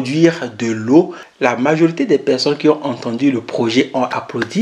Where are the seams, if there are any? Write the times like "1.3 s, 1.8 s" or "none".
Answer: 1.2 s